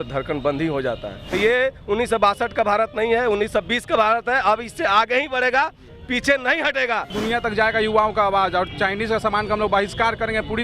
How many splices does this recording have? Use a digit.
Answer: 2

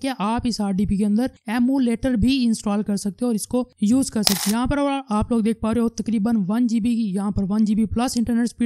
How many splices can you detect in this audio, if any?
1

